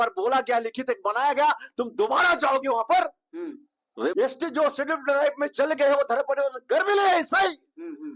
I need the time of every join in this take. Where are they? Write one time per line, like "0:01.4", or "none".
0:04.1